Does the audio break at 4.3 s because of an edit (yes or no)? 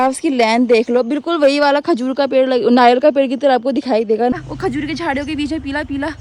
yes